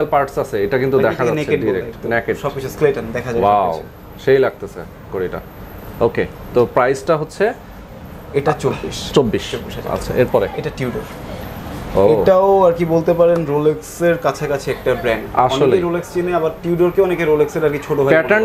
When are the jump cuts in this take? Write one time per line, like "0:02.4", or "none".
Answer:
none